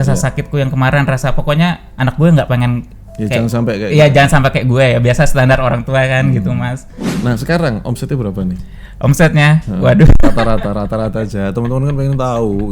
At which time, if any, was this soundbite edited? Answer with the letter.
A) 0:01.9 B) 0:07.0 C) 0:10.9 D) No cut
B